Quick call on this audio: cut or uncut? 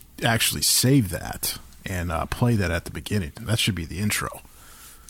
uncut